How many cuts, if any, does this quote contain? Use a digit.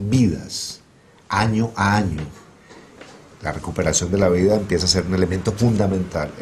1